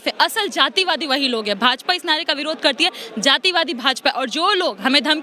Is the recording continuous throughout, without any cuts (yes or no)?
yes